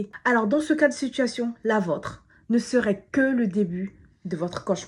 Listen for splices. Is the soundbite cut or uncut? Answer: uncut